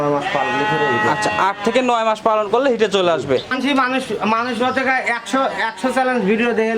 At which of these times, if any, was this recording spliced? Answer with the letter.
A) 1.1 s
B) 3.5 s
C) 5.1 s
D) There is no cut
B